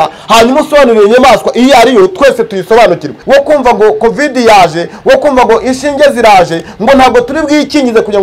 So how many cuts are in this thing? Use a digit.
1